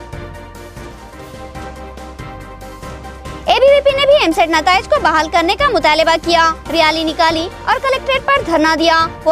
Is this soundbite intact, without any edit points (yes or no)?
yes